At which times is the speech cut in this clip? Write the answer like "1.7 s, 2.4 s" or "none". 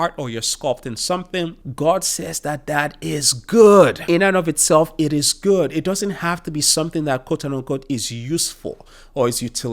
1.6 s, 4.0 s